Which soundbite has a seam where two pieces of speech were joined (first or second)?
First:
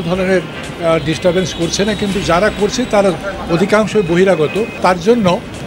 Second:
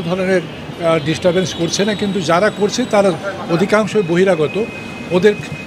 first